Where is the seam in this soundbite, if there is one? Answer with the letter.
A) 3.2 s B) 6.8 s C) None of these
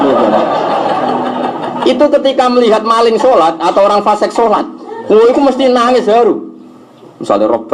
C